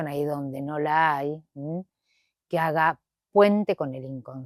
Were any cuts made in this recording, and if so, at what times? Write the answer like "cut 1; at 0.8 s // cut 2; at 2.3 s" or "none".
none